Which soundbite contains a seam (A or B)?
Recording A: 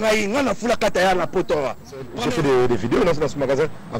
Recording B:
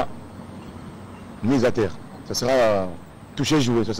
A